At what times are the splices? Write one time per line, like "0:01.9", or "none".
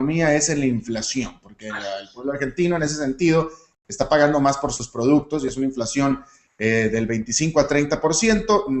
0:07.8